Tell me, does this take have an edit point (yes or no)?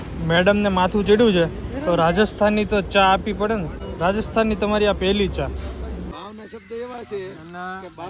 yes